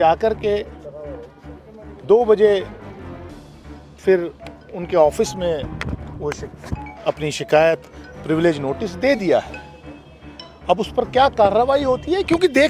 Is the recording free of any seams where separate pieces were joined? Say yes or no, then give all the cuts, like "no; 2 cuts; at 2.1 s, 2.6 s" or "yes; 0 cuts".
yes; 0 cuts